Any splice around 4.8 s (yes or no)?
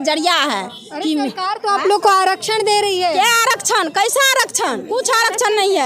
yes